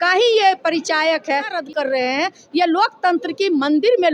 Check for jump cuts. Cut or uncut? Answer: cut